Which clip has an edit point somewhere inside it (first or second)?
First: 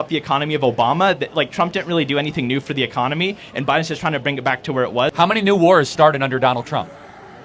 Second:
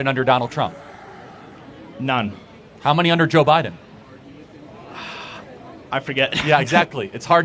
first